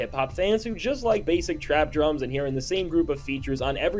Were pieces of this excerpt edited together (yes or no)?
no